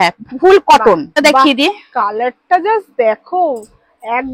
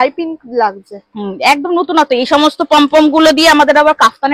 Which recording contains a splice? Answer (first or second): first